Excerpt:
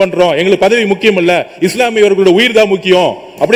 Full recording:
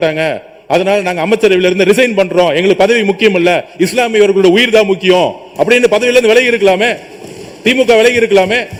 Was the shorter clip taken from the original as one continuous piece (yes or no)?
yes